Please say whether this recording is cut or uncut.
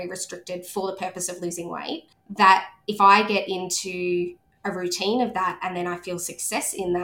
uncut